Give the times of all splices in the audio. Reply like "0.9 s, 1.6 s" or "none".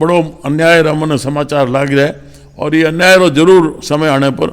none